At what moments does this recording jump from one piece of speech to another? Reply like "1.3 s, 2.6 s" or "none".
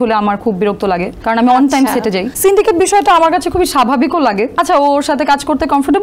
1.1 s, 2.3 s, 4.5 s